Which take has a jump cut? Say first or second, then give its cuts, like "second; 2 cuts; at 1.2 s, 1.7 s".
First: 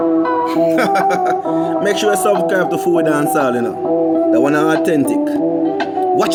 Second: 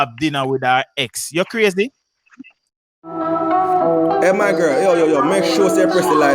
second; 1 cut; at 2.8 s